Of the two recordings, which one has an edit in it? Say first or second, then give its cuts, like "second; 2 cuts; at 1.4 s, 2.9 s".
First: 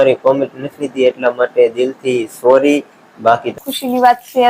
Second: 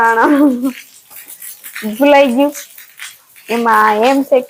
first; 1 cut; at 3.5 s